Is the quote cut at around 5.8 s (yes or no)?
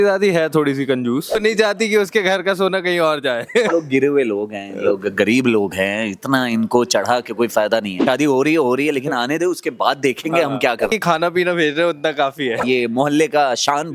no